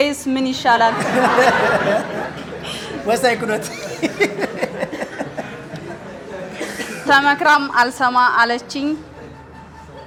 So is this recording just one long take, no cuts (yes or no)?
yes